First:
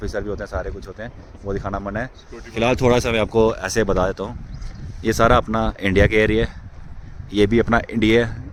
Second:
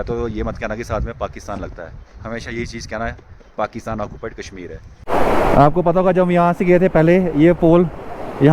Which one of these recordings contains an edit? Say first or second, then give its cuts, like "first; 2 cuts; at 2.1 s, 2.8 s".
second; 1 cut; at 5.1 s